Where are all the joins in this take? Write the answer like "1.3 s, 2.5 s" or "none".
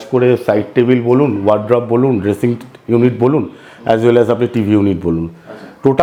none